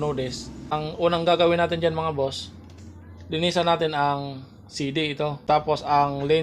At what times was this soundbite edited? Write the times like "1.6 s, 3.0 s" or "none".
0.7 s, 5.4 s